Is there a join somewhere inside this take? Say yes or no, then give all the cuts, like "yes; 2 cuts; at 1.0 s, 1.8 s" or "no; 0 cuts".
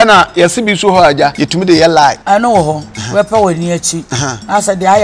yes; 3 cuts; at 1.4 s, 2.2 s, 2.9 s